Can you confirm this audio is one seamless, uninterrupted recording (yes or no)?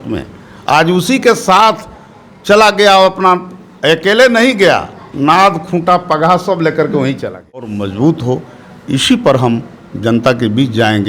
no